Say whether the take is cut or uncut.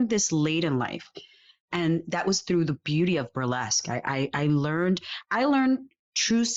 uncut